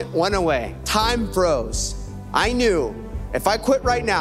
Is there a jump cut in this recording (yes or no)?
no